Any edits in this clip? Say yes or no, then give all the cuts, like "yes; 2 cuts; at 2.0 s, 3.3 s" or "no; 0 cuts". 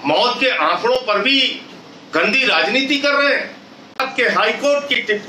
yes; 1 cut; at 4.0 s